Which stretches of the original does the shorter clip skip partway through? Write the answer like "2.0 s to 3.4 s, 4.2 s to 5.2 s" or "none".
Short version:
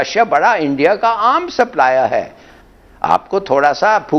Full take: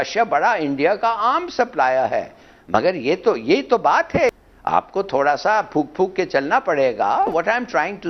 2.7 s to 4.3 s